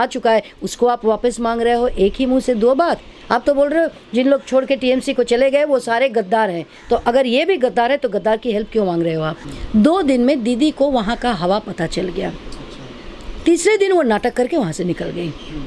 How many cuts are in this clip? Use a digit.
1